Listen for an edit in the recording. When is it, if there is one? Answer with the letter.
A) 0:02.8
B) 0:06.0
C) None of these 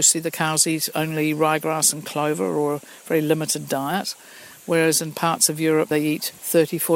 B